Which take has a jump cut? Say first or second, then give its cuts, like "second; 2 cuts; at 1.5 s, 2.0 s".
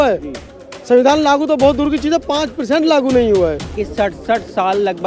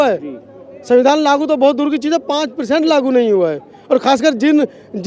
first; 1 cut; at 3.7 s